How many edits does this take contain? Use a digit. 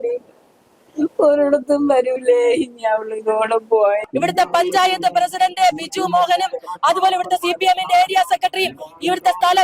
1